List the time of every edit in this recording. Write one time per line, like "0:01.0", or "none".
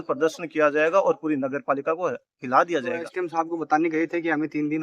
0:03.1